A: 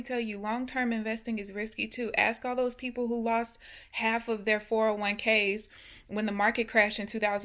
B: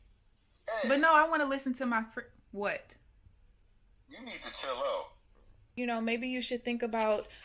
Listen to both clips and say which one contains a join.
B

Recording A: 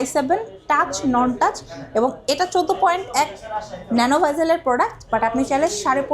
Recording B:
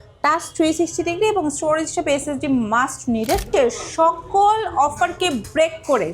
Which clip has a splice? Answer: B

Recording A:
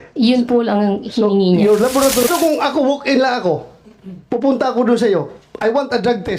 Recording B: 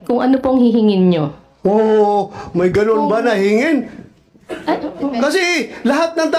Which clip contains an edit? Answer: A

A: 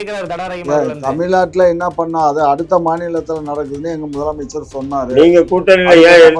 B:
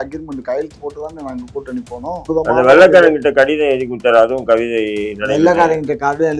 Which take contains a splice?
B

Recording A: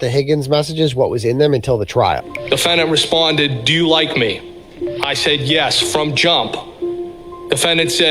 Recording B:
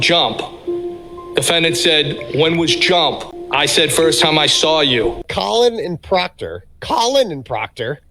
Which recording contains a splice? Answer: B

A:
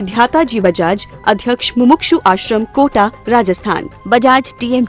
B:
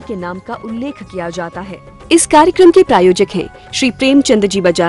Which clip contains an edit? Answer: B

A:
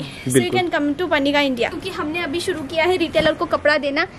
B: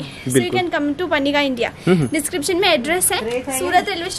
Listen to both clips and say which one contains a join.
A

